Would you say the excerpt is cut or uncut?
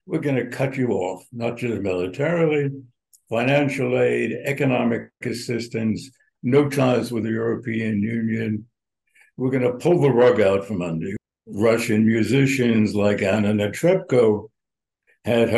cut